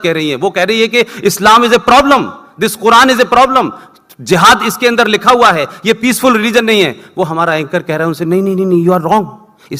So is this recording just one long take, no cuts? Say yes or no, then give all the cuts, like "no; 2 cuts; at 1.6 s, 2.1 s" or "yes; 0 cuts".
yes; 0 cuts